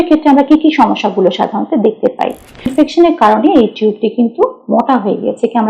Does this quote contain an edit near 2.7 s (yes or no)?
yes